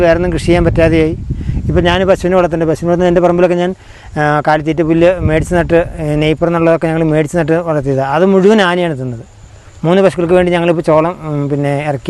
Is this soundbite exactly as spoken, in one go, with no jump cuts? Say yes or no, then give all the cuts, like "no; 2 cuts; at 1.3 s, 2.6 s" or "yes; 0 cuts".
yes; 0 cuts